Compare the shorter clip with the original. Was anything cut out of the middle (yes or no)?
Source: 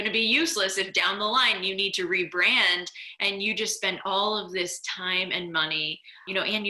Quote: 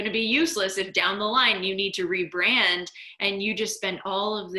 no